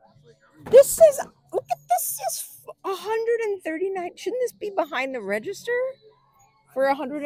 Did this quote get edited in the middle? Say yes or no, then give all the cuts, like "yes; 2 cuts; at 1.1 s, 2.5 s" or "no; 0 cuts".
no; 0 cuts